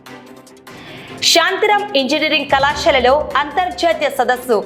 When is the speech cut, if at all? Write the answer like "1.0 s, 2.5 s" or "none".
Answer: none